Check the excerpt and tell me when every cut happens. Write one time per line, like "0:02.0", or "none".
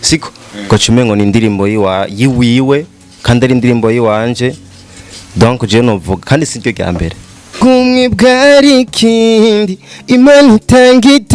0:07.5